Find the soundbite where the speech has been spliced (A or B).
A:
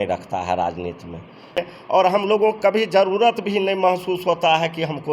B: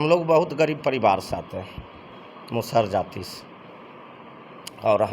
A